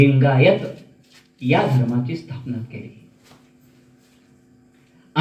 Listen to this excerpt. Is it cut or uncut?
uncut